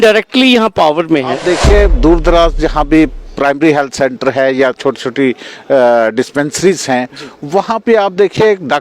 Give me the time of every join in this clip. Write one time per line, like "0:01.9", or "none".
0:01.4